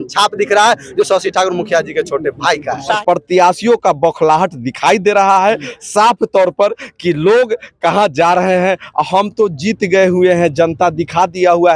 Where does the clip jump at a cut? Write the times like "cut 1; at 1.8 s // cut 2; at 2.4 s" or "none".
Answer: cut 1; at 3.0 s

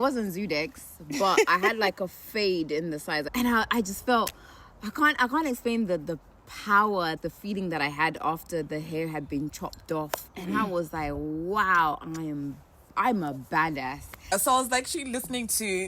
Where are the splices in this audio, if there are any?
cut 1; at 3.3 s // cut 2; at 7.2 s // cut 3; at 14.1 s

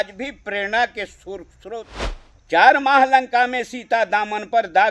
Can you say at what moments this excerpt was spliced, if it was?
cut 1; at 1.9 s

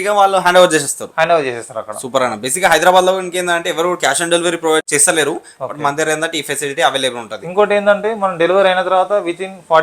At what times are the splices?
cut 1; at 4.8 s

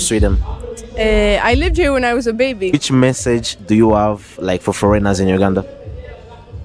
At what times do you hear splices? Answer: cut 1; at 2.8 s

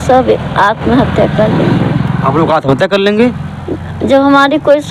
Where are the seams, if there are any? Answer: none

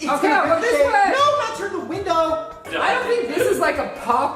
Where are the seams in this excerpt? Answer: cut 1; at 2.7 s

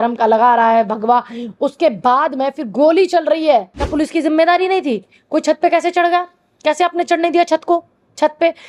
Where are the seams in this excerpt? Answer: cut 1; at 3.8 s

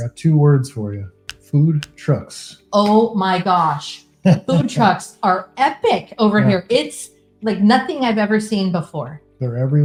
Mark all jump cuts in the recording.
none

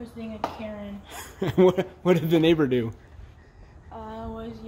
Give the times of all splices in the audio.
none

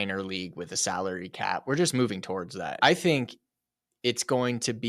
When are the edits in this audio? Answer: cut 1; at 2.8 s

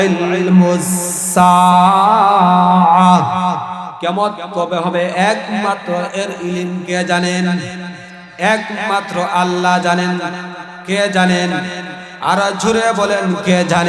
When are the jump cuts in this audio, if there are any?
cut 1; at 3.9 s

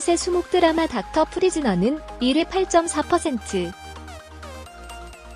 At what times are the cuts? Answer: cut 1; at 3.7 s

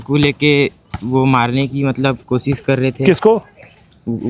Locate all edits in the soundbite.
none

